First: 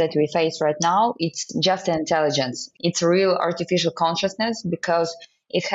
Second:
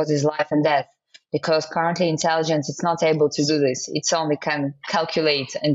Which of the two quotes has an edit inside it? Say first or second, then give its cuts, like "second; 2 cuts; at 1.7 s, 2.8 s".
first; 1 cut; at 2.6 s